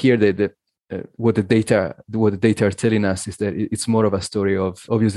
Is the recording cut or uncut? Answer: uncut